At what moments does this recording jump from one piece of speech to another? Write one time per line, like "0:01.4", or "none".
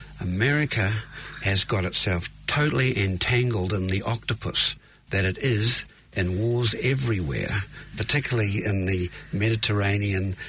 none